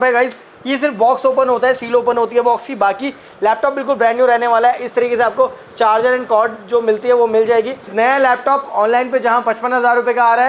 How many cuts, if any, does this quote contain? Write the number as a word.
one